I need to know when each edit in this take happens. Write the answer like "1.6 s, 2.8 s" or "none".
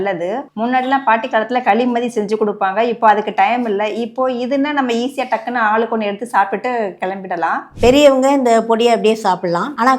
7.7 s